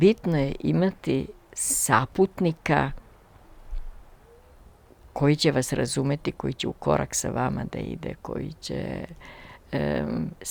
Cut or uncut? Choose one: uncut